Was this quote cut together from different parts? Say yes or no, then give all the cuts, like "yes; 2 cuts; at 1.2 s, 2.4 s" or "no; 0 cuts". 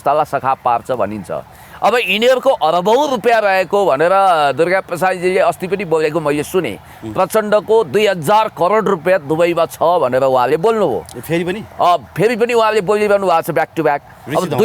no; 0 cuts